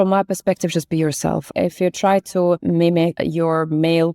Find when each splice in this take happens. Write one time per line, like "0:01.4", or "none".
0:01.5
0:02.9